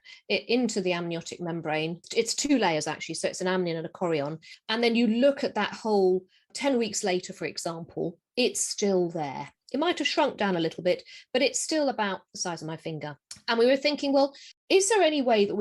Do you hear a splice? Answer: yes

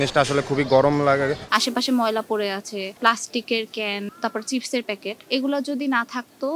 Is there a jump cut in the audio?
yes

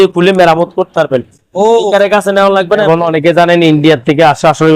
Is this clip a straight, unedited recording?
no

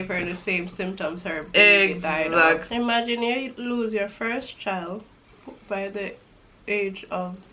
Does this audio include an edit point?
yes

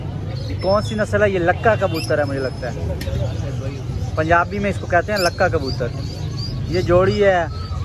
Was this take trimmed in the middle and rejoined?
no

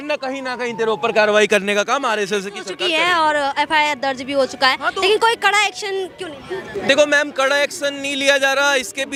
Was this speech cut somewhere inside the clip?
no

